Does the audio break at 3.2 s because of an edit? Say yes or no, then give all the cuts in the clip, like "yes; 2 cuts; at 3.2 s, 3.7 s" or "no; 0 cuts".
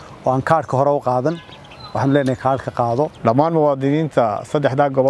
yes; 1 cut; at 3.2 s